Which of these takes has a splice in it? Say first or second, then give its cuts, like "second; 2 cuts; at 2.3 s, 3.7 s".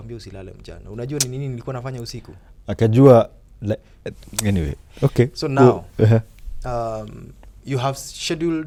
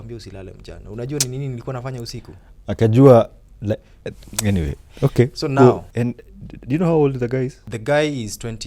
second; 2 cuts; at 5.9 s, 7.7 s